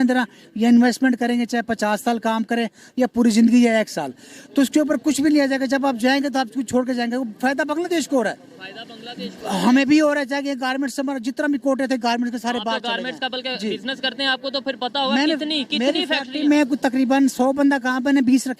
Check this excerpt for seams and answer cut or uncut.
uncut